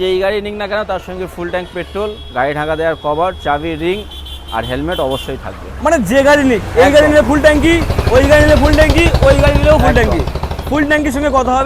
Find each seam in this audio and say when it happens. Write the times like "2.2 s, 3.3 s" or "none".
none